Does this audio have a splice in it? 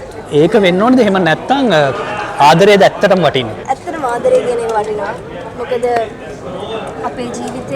yes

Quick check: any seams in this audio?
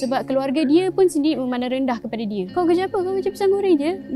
no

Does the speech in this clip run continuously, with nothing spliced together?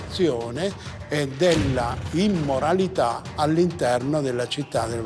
yes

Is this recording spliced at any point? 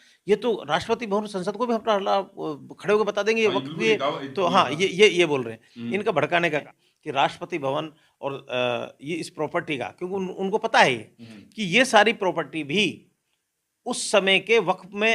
yes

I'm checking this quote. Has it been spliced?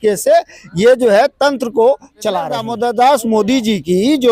yes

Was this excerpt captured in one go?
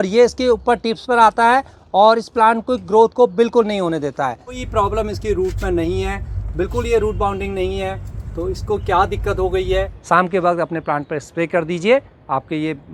no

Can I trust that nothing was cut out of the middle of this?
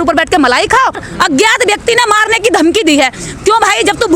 no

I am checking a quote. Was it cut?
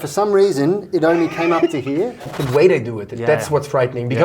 yes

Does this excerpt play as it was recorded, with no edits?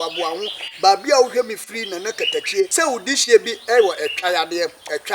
no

